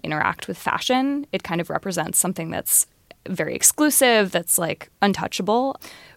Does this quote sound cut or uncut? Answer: uncut